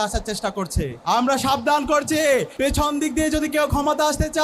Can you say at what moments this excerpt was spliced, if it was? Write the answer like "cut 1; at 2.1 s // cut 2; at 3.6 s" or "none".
cut 1; at 0.9 s // cut 2; at 2.5 s